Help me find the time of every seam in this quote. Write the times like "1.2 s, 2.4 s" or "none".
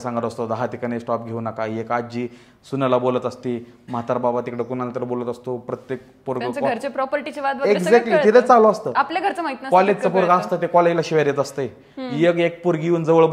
none